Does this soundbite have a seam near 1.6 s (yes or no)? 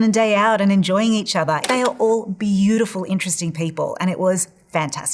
yes